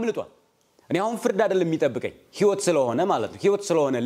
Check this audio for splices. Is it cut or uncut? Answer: uncut